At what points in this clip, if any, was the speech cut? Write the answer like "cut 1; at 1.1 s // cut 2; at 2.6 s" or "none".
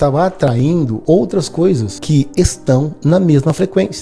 cut 1; at 1.0 s // cut 2; at 1.9 s